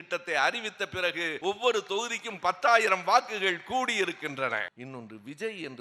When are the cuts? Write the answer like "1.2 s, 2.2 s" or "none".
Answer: 1.3 s, 4.8 s